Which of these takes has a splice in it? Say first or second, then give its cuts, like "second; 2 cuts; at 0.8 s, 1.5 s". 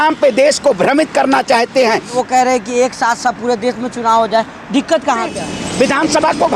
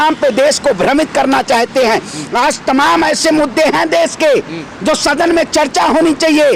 first; 2 cuts; at 2.2 s, 5.3 s